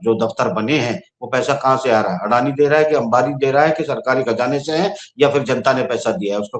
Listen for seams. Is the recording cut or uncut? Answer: uncut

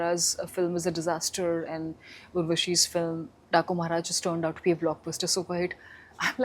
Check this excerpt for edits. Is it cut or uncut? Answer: uncut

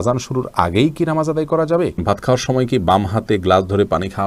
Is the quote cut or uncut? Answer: cut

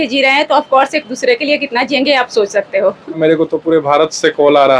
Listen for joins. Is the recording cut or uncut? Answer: cut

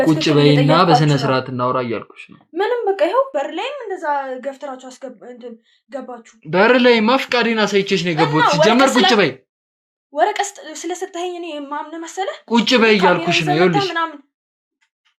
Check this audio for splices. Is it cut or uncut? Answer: uncut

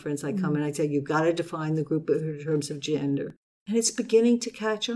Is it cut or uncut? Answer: cut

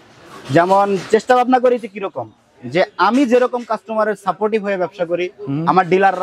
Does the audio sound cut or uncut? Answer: uncut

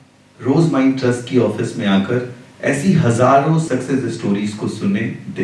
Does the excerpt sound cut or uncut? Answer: uncut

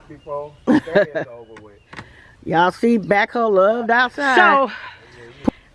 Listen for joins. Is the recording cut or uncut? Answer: cut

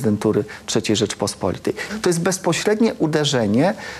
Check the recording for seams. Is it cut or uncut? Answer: cut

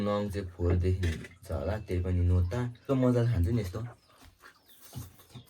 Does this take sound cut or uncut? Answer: cut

